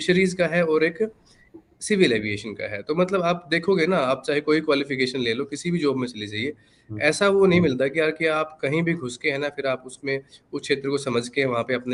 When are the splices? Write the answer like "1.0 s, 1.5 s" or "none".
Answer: none